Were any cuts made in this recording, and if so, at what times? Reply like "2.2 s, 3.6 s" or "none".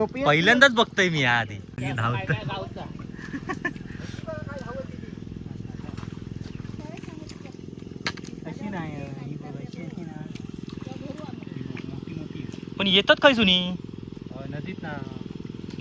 1.7 s, 6.8 s